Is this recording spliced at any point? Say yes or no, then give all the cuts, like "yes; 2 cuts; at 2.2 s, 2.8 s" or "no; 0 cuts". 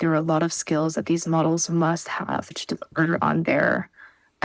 yes; 1 cut; at 2.5 s